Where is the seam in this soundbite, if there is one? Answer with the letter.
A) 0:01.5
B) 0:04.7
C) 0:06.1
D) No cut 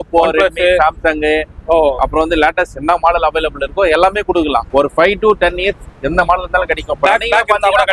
B